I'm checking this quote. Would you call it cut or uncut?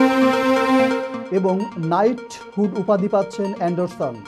uncut